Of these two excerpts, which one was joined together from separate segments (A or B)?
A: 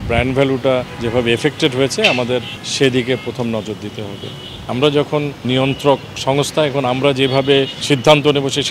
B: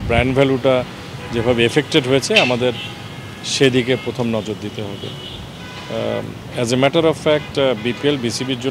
A